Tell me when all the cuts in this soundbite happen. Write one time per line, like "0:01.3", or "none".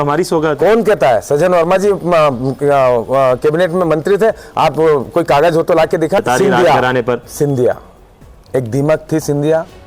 0:06.2